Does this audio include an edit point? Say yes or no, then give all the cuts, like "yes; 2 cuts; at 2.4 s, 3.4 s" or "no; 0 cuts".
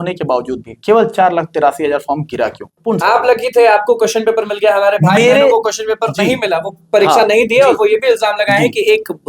yes; 1 cut; at 2.7 s